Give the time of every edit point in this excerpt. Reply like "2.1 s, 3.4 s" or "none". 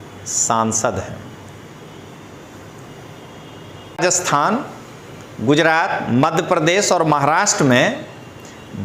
4.0 s